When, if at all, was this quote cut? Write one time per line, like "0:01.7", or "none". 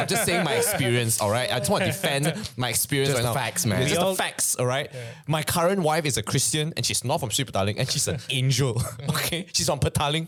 none

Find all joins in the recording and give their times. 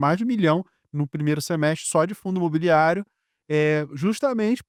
none

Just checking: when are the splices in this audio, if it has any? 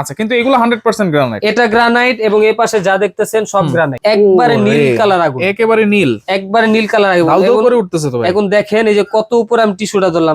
0:03.9

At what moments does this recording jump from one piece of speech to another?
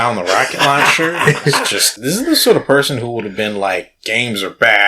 0:01.9

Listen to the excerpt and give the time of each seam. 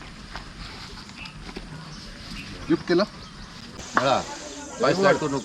0:03.9

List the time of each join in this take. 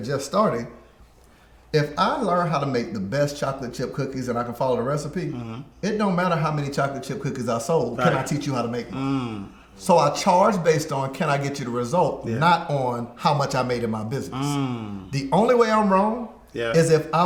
none

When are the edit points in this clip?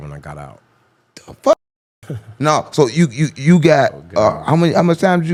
none

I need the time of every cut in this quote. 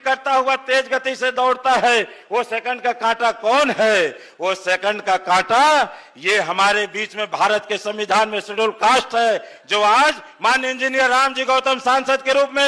none

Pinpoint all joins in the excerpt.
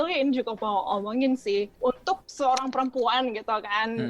0:01.7

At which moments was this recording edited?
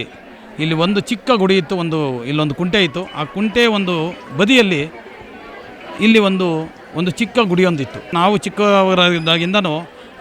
0:08.1

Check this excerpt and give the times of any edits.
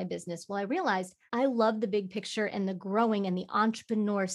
0:01.2

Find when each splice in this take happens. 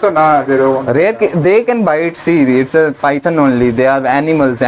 none

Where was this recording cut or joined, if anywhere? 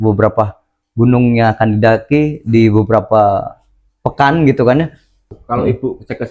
0:05.4

